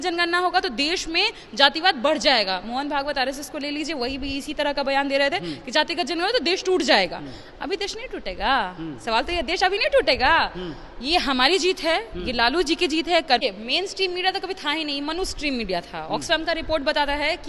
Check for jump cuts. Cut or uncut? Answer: cut